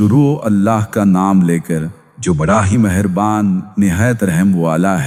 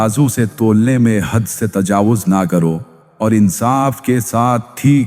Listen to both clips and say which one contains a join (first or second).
second